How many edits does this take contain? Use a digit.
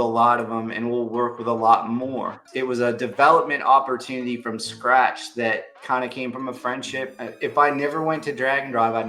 3